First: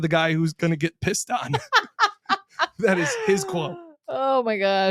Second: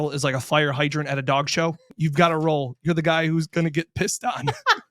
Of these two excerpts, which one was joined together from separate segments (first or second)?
second